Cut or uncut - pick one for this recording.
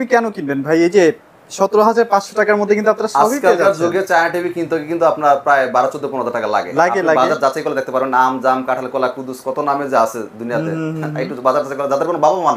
uncut